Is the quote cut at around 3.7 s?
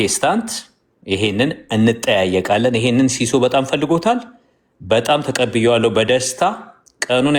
no; 0 cuts

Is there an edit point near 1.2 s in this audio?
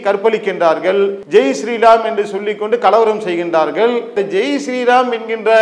yes; 2 cuts; at 1.2 s, 4.1 s

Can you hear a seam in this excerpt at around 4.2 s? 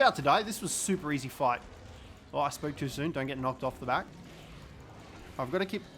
yes; 1 cut; at 4.2 s

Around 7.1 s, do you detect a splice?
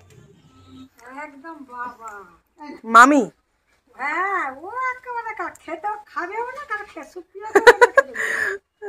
no; 1 cut; at 0.9 s

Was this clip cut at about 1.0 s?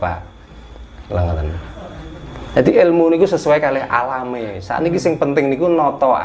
no; 1 cut; at 2.2 s

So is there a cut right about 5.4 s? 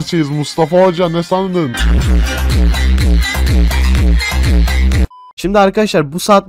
yes; 1 cut; at 5.4 s

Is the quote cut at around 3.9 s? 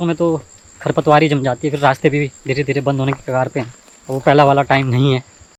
no; 0 cuts

